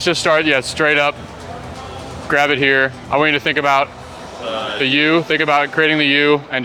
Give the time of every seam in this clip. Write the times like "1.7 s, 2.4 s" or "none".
none